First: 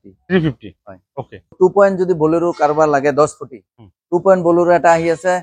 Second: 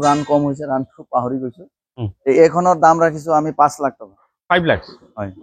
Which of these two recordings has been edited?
first; 1 cut; at 1.5 s

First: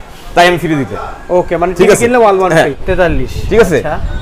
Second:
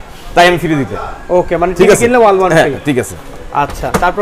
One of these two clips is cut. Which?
first; 1 cut; at 2.8 s

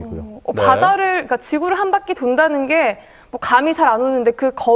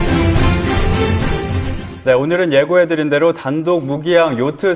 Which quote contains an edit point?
second; 1 cut; at 3.6 s

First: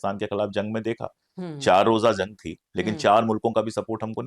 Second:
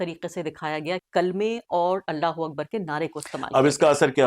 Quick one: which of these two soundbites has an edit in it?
second; 1 cut; at 1.0 s

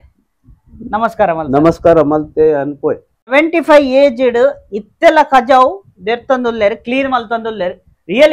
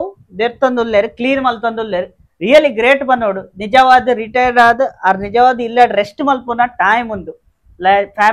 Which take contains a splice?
first; 1 cut; at 3.3 s

